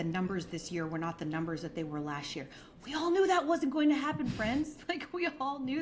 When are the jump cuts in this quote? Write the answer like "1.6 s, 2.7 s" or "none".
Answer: 2.9 s

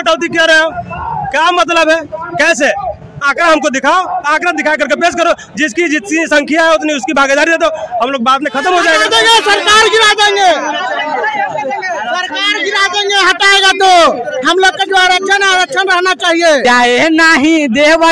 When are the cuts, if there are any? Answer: 9.0 s, 16.6 s

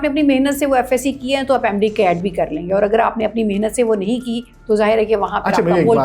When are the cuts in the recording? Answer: none

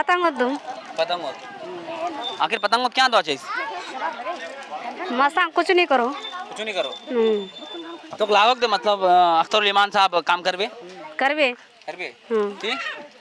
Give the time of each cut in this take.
none

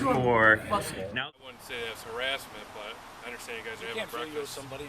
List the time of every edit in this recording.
1.0 s

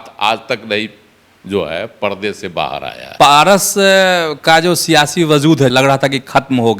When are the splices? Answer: 3.0 s, 5.7 s

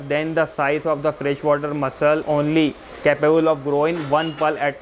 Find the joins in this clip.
2.2 s

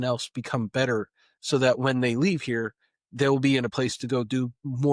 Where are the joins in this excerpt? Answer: 3.7 s

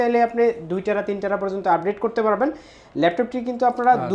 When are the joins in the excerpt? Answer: none

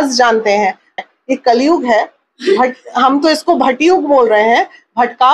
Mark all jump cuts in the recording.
1.0 s

